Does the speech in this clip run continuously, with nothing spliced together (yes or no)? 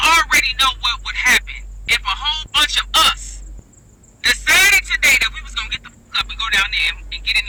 yes